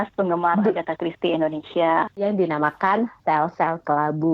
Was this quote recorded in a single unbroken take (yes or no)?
no